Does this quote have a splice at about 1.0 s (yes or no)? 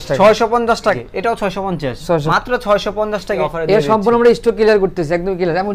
yes